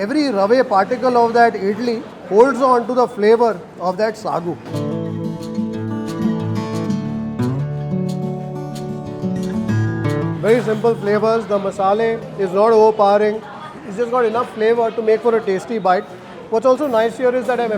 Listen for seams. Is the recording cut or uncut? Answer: uncut